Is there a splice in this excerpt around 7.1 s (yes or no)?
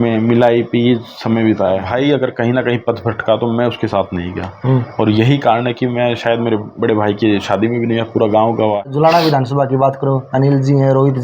no